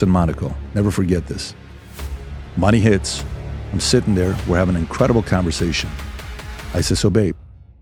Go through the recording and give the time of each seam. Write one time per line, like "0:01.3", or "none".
none